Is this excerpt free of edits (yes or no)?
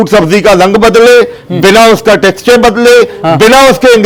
yes